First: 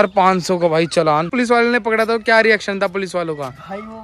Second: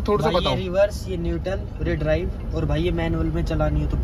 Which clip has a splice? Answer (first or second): first